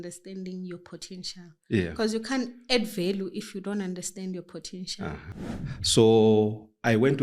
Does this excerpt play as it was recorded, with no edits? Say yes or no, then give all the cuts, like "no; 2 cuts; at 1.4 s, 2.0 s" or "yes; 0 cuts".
no; 1 cut; at 5.3 s